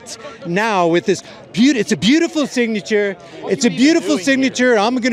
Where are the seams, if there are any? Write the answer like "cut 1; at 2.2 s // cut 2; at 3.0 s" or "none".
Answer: none